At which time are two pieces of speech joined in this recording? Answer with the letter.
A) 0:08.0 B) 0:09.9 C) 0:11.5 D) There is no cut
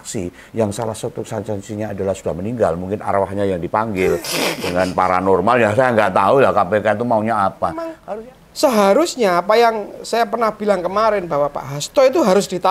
A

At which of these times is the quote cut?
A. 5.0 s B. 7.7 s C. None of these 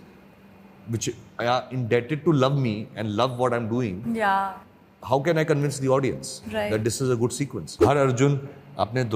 B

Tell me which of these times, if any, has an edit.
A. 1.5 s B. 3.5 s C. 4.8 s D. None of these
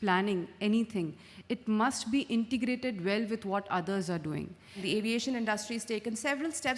C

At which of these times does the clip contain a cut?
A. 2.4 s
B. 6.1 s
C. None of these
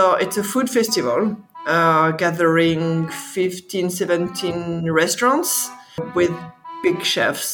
B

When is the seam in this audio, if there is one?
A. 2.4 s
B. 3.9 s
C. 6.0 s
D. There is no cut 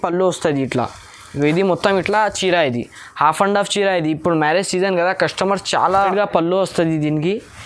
C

